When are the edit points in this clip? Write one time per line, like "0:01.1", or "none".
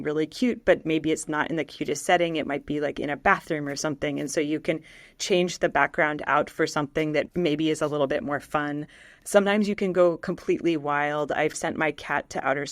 0:11.6